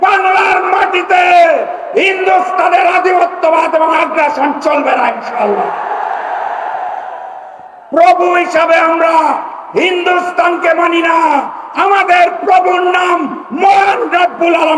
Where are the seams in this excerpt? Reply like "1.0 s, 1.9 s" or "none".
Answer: none